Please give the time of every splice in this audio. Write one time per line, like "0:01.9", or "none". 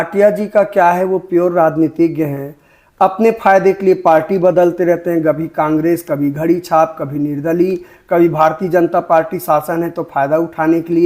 none